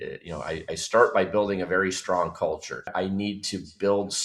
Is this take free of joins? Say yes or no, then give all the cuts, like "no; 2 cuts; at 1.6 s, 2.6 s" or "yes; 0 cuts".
no; 1 cut; at 2.9 s